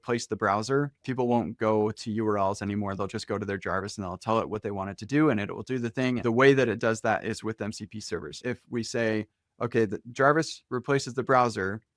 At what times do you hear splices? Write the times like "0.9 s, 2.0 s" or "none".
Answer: 1.1 s, 6.2 s, 8.4 s